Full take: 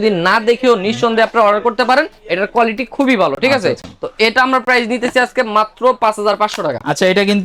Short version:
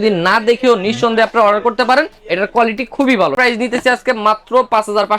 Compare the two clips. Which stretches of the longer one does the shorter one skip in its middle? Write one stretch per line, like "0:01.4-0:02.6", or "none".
0:03.3-0:04.6